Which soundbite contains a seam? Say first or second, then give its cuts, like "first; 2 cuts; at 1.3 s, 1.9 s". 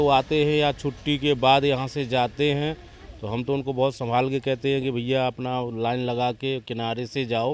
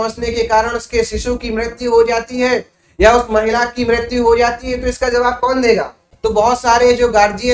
second; 1 cut; at 6.0 s